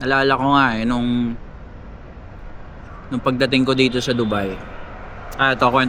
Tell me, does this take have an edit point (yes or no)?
no